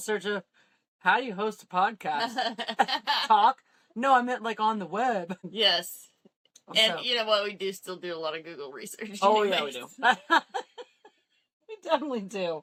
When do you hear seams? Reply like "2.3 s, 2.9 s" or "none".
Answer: none